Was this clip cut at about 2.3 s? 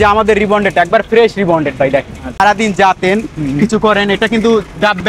yes; 1 cut; at 2.3 s

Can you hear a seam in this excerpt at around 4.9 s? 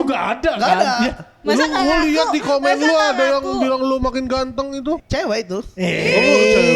yes; 1 cut; at 4.9 s

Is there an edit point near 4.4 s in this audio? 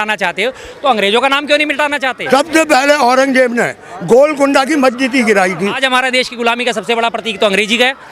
no; 2 cuts; at 2.2 s, 5.8 s

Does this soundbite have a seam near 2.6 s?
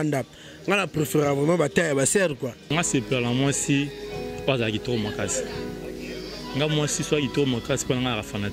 yes; 1 cut; at 2.6 s

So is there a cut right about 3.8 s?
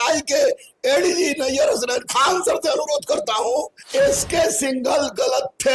yes; 1 cut; at 3.8 s

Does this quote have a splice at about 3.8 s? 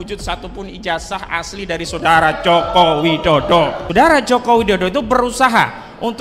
yes; 1 cut; at 3.8 s

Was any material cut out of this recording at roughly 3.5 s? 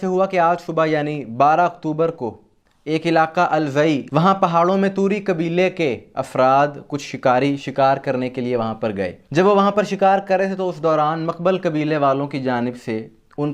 no; 0 cuts

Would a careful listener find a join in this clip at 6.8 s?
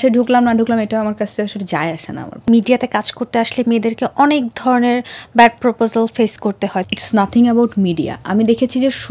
yes; 2 cuts; at 2.4 s, 6.8 s

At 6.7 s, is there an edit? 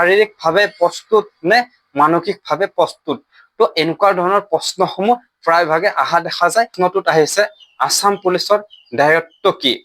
yes; 1 cut; at 6.7 s

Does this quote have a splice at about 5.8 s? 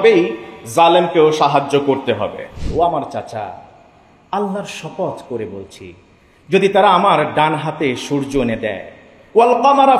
no; 1 cut; at 2.6 s

